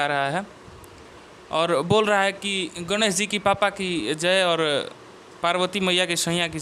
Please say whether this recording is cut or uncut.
uncut